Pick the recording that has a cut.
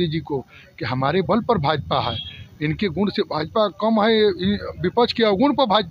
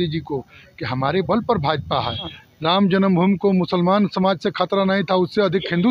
second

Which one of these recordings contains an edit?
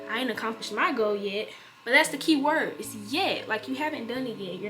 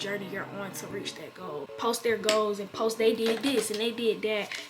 second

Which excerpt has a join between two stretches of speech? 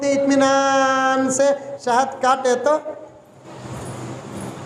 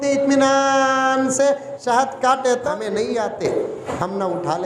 second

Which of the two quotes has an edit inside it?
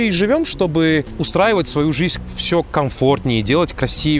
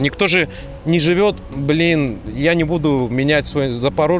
first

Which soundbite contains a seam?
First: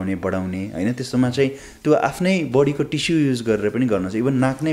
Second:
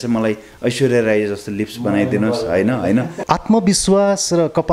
second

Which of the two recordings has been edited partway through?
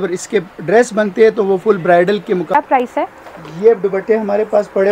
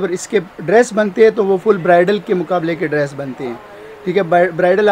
first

